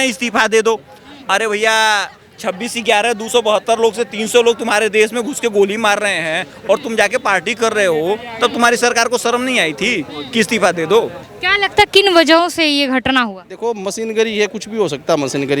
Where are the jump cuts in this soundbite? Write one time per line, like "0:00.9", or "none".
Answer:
0:11.2